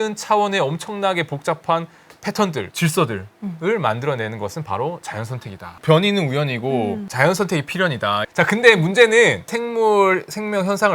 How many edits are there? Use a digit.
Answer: 1